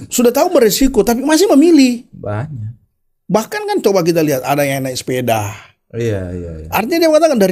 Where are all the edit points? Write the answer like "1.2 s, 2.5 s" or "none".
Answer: none